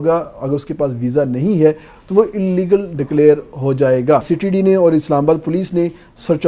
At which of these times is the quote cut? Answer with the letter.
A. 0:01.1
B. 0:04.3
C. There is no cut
B